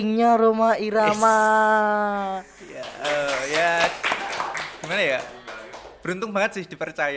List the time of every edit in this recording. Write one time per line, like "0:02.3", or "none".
none